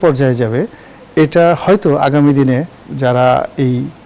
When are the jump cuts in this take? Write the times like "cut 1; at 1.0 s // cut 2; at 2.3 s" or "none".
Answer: cut 1; at 2.8 s